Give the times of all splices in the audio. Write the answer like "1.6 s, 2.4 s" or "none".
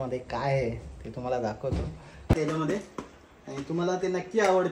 2.3 s